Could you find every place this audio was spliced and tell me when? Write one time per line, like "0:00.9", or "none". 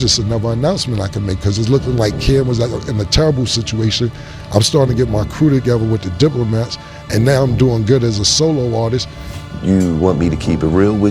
0:09.2

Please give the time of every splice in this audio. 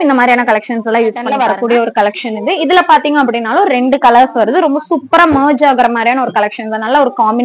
0:01.4

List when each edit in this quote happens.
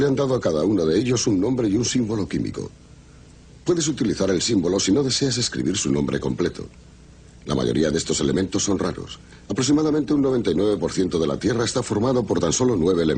0:04.8

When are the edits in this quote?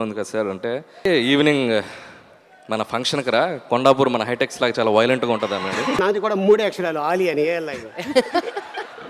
0:01.1
0:06.0

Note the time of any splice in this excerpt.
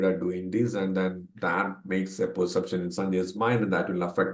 none

